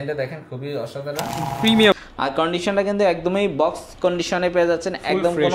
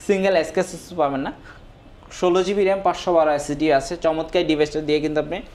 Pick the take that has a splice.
first; 1 cut; at 2.0 s

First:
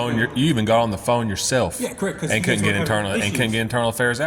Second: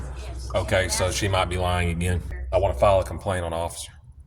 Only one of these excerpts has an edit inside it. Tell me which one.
second; 1 cut; at 2.3 s

